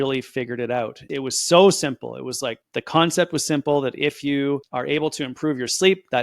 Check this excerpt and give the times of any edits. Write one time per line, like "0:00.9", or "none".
0:01.0